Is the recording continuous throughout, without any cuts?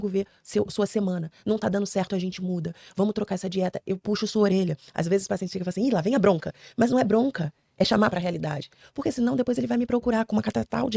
no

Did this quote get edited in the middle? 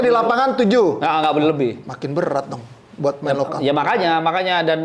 no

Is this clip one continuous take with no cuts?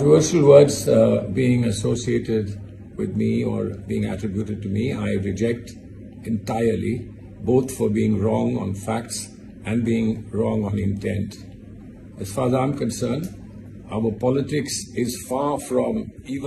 yes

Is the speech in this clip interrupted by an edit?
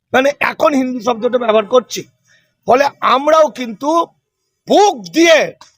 no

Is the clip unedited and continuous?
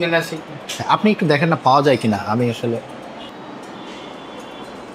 no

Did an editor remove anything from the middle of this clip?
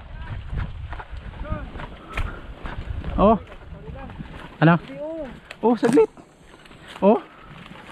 no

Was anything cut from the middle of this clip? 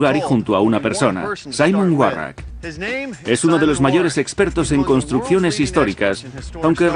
no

